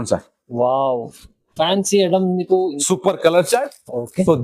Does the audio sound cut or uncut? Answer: cut